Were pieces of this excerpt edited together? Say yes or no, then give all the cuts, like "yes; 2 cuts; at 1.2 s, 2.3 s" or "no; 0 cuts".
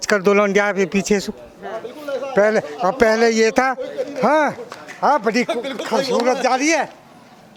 no; 0 cuts